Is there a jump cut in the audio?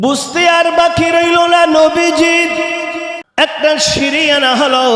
yes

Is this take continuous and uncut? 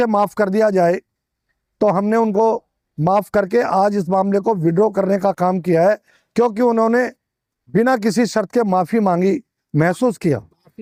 yes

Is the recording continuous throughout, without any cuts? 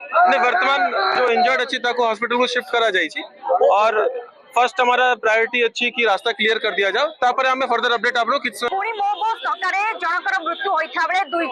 no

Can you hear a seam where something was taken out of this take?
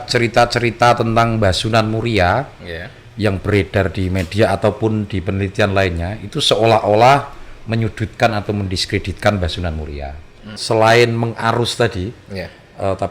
yes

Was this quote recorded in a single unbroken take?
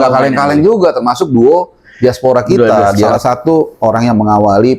no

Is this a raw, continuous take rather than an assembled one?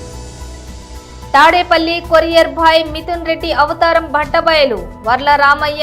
no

